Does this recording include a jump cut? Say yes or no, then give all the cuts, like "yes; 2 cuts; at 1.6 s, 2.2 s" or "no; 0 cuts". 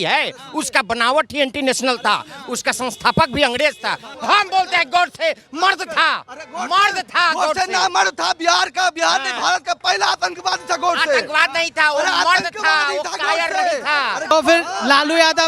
yes; 2 cuts; at 4.1 s, 14.3 s